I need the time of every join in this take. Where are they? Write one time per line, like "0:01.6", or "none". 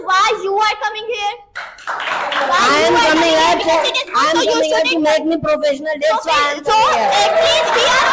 none